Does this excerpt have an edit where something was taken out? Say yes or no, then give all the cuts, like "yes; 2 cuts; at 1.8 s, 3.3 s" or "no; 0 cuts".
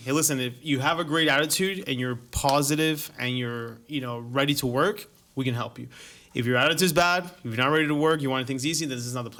no; 0 cuts